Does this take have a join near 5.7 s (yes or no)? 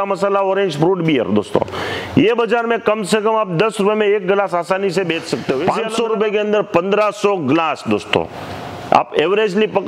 yes